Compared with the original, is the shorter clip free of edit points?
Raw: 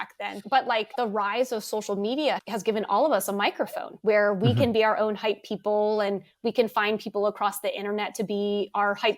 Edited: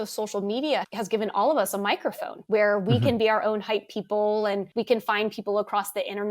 no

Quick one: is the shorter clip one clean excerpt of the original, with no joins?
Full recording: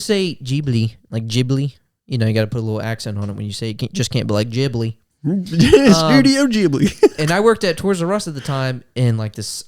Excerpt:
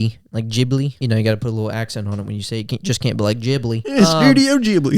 no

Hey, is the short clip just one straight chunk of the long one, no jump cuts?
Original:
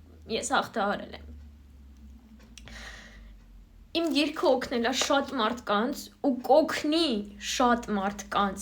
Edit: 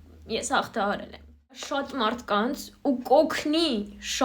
no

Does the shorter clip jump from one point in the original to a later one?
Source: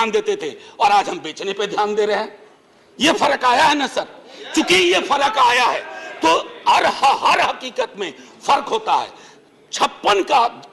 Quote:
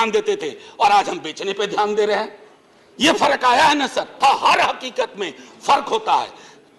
yes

